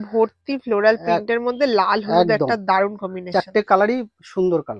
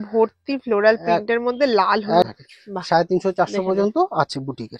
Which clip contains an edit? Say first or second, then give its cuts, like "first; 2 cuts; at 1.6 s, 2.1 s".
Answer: second; 1 cut; at 2.3 s